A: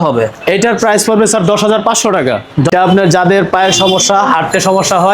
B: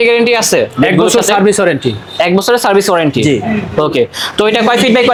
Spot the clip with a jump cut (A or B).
A